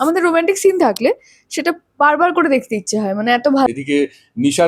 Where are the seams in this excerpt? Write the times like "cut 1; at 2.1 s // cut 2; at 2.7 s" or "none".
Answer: cut 1; at 3.7 s